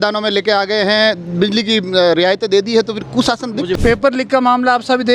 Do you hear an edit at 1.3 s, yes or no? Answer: no